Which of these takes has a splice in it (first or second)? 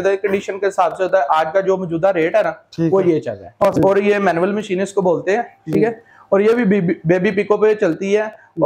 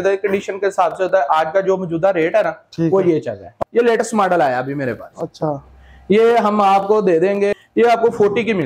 second